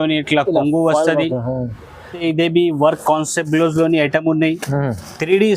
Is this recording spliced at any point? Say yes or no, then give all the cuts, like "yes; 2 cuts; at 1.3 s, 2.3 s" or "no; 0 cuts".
yes; 1 cut; at 2.2 s